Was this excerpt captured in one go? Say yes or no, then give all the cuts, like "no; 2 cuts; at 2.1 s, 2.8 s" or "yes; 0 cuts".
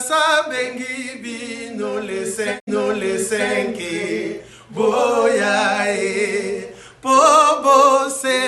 no; 1 cut; at 2.6 s